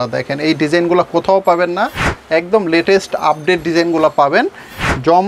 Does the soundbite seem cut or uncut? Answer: uncut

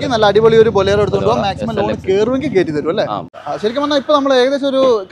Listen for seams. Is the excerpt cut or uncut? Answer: cut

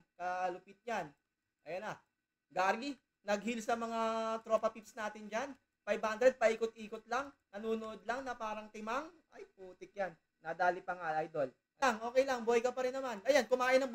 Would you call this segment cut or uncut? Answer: cut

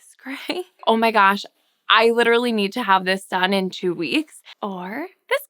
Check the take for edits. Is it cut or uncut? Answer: cut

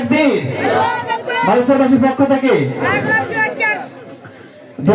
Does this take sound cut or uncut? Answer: uncut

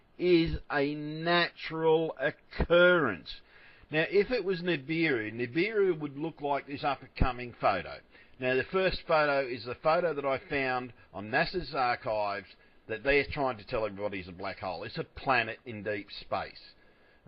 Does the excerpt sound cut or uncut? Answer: uncut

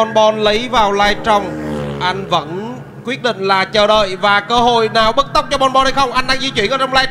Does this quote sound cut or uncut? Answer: uncut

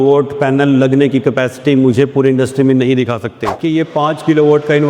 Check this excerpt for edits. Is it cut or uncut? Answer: cut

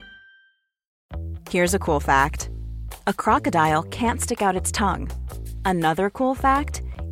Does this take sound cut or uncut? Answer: cut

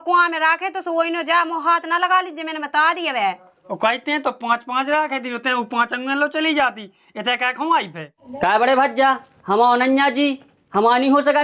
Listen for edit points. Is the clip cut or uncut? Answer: cut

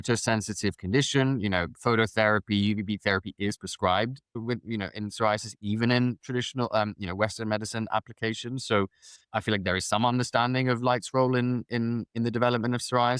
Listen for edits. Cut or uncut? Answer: uncut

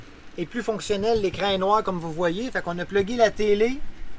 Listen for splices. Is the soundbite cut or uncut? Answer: uncut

